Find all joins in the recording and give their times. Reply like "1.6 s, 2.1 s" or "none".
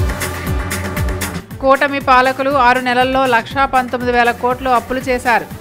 1.3 s